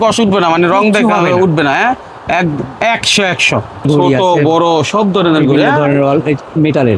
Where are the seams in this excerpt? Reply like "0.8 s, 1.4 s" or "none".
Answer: 3.9 s